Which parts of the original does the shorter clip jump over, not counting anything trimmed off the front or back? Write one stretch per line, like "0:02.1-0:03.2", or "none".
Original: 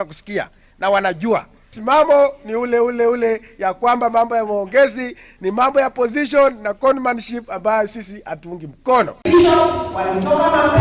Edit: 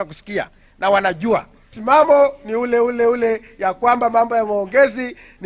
none